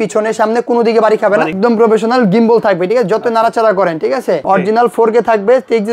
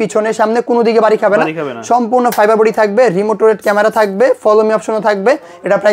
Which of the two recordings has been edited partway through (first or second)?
first